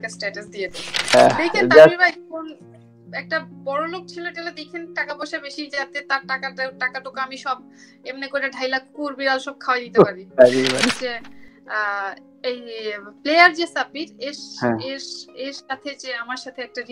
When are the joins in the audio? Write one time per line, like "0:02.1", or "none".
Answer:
0:01.1
0:11.0